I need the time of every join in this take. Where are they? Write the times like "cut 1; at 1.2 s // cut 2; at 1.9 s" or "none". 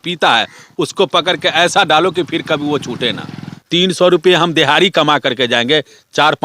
cut 1; at 3.6 s